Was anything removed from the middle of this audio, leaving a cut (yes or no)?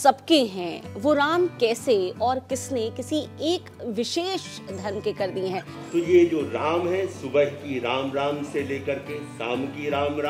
yes